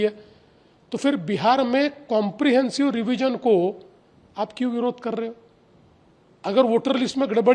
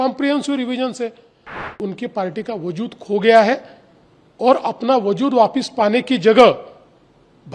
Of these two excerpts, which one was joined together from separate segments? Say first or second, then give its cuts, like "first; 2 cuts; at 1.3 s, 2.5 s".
second; 1 cut; at 1.6 s